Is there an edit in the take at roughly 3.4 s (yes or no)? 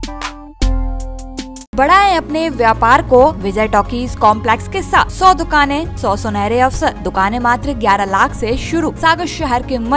yes